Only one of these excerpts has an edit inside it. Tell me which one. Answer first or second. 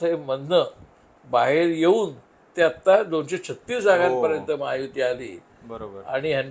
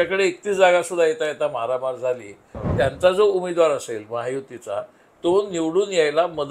second